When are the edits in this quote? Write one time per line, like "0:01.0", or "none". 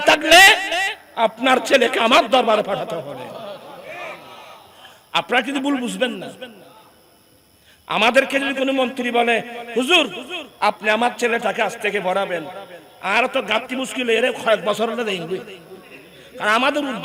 none